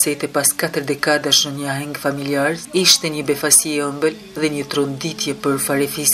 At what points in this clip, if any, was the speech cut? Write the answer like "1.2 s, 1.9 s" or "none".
none

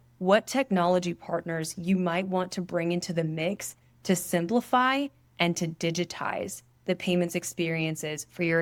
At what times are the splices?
none

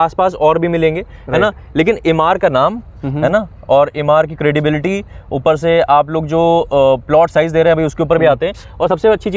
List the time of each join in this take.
none

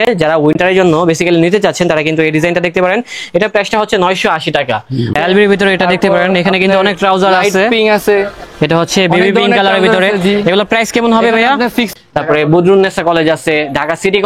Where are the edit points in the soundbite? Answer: 5.1 s, 11.9 s

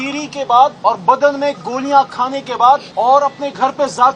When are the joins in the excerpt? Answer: 0.8 s, 2.9 s

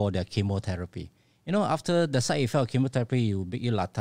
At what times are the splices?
none

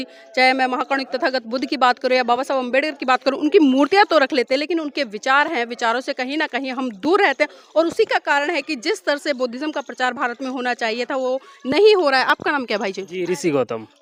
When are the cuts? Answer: none

